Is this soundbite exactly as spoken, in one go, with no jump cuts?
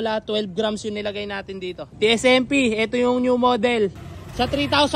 no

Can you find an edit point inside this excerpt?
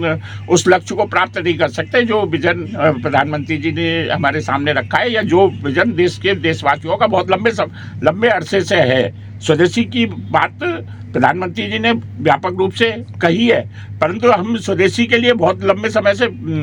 no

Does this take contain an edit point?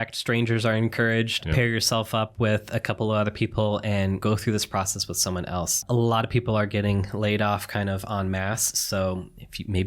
yes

